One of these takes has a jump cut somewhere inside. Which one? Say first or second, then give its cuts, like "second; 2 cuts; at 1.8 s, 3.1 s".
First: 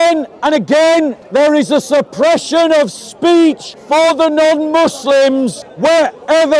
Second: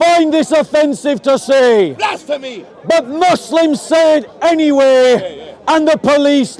first; 3 cuts; at 1.2 s, 3.7 s, 5.6 s